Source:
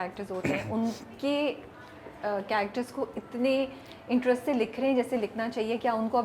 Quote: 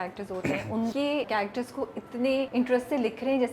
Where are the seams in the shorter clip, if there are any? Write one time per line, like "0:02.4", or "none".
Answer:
0:01.2
0:02.5